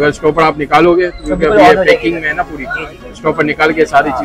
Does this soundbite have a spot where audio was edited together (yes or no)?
no